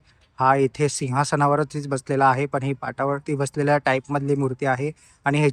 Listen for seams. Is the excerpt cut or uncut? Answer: uncut